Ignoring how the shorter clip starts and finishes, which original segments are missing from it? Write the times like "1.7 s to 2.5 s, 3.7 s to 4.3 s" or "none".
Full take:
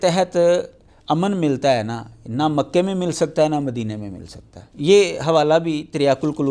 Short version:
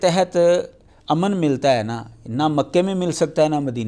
none